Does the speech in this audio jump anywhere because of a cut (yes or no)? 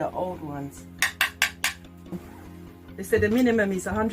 yes